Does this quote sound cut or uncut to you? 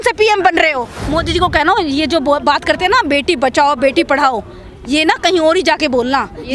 cut